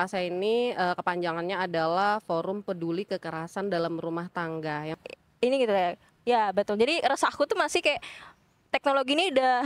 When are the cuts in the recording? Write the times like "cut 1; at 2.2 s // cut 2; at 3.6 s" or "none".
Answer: cut 1; at 5.0 s

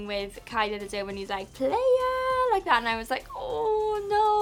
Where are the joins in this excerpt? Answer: none

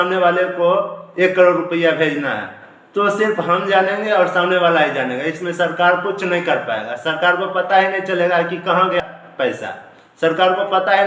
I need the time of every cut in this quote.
cut 1; at 9.0 s

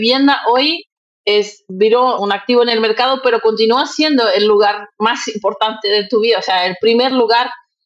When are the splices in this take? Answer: cut 1; at 2.2 s

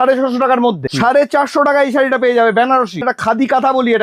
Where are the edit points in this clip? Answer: cut 1; at 0.8 s // cut 2; at 3.1 s

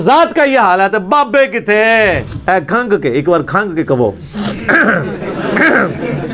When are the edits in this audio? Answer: cut 1; at 2.3 s

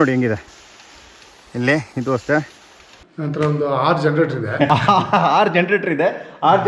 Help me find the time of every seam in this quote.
cut 1; at 2.9 s // cut 2; at 4.7 s

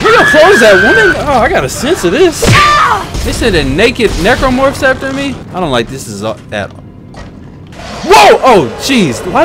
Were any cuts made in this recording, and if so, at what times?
cut 1; at 5.4 s

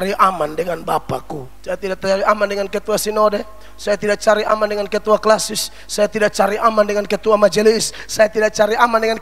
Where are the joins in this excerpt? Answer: cut 1; at 1.5 s

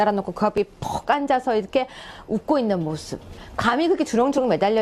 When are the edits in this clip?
none

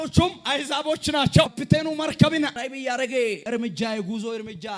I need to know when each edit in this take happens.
cut 1; at 1.6 s // cut 2; at 2.6 s // cut 3; at 3.4 s

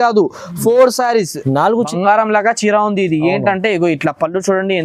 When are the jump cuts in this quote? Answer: cut 1; at 1.9 s

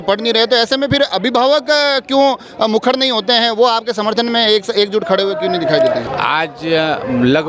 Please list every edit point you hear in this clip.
cut 1; at 6.1 s

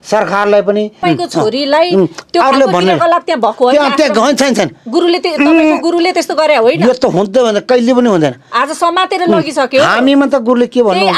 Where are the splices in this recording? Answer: cut 1; at 1.0 s

